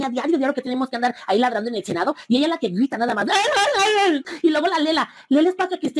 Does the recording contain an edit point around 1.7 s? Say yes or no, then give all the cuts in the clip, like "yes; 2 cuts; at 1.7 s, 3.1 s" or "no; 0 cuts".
no; 1 cut; at 4.3 s